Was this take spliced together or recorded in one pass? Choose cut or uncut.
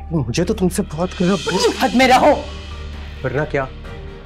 uncut